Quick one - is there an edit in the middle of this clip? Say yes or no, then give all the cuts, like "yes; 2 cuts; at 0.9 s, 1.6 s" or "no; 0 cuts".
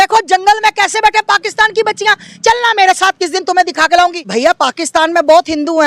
no; 0 cuts